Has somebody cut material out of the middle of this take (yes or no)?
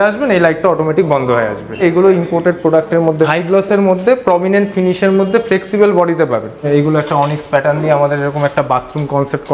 yes